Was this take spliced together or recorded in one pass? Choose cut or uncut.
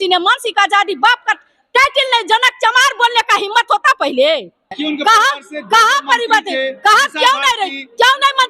cut